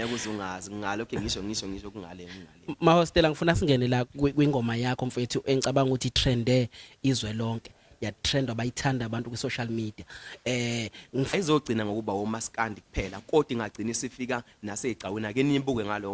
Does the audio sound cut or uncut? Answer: cut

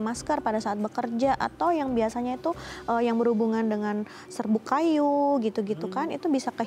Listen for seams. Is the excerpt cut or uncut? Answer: uncut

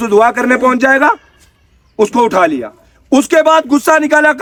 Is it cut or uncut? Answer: uncut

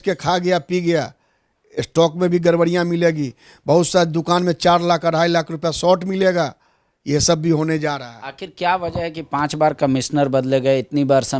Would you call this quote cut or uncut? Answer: uncut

